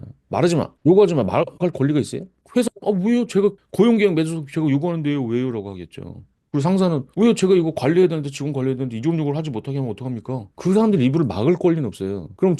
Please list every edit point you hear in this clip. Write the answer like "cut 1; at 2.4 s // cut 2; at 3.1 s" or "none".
none